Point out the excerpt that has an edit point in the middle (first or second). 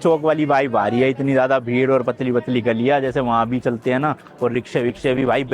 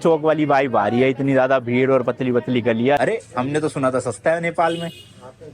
second